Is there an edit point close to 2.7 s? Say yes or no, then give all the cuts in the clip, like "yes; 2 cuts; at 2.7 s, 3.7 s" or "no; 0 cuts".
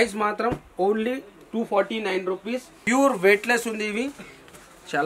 yes; 1 cut; at 2.7 s